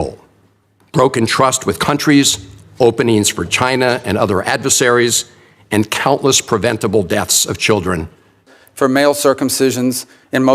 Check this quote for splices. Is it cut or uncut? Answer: cut